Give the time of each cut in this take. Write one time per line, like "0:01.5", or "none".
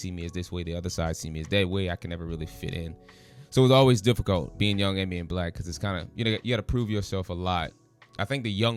none